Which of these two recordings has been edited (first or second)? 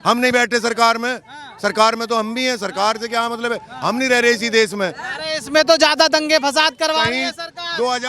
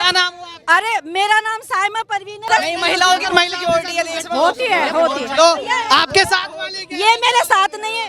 second